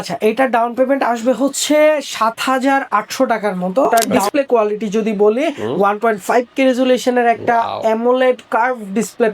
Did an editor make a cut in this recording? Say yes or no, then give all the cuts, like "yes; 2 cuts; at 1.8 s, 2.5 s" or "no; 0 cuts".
yes; 1 cut; at 3.9 s